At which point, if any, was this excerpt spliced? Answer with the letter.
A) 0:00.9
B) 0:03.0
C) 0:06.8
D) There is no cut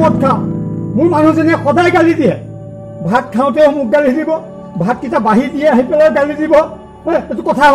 D